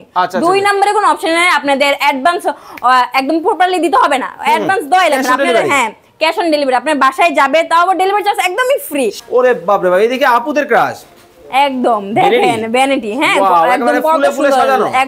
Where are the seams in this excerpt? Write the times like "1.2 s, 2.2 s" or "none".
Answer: 9.2 s